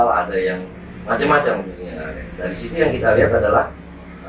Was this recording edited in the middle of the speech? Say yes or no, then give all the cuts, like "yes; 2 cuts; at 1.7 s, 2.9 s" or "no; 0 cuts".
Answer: no; 0 cuts